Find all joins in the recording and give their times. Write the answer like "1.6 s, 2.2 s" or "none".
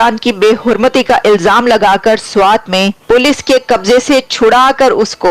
3.0 s